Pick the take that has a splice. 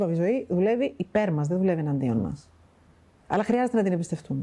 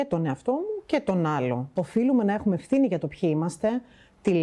second; 1 cut; at 1.7 s

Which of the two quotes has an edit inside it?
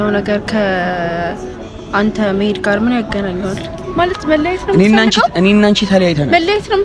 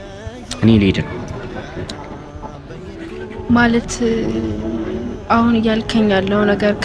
first; 1 cut; at 3.8 s

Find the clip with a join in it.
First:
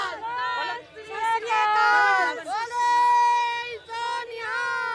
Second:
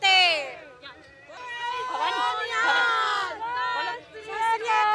second; 1 cut; at 1.4 s

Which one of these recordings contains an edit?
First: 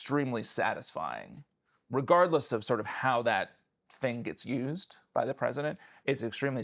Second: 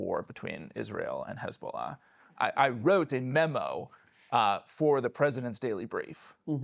second; 1 cut; at 2.4 s

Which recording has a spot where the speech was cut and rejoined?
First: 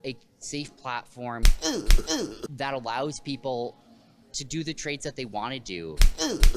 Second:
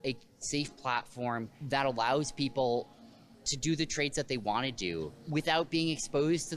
second; 2 cuts; at 1.5 s, 5.2 s

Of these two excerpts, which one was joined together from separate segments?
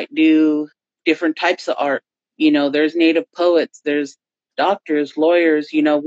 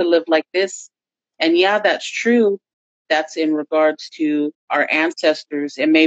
second; 2 cuts; at 2.8 s, 4.6 s

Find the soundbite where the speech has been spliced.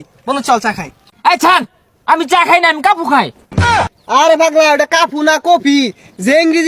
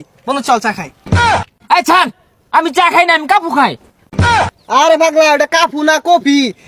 first; 2 cuts; at 1.0 s, 3.8 s

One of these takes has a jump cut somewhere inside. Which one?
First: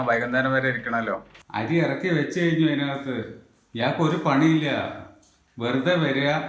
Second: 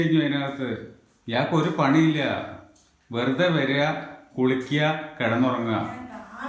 first; 1 cut; at 1.3 s

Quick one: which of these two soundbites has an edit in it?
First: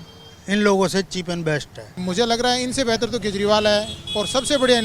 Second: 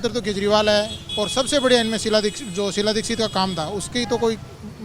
first; 1 cut; at 2.0 s

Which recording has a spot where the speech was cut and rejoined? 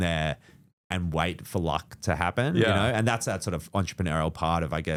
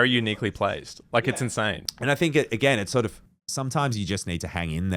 second; 1 cut; at 1.9 s

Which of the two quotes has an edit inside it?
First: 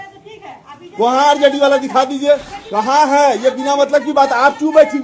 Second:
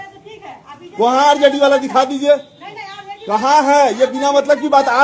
first; 1 cut; at 2.6 s

